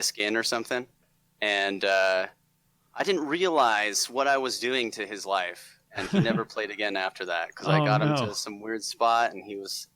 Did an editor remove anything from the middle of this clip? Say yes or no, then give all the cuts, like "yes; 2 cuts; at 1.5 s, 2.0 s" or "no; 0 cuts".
yes; 1 cut; at 1.0 s